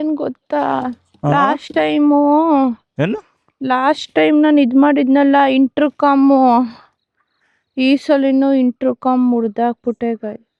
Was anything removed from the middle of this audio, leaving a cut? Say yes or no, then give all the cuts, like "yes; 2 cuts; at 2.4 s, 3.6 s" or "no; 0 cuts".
no; 0 cuts